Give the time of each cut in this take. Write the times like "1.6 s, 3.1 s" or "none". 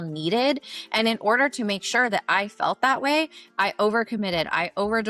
none